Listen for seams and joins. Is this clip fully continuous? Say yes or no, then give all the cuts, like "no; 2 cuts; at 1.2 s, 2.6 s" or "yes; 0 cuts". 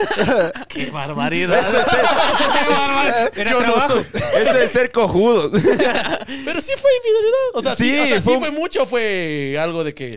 yes; 0 cuts